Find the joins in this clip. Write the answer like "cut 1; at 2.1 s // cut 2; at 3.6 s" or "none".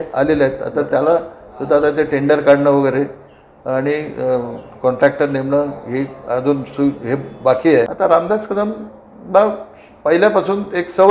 cut 1; at 7.9 s